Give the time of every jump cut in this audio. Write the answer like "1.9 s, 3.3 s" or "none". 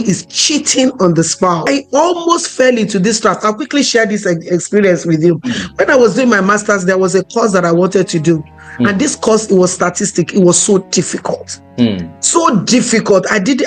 1.6 s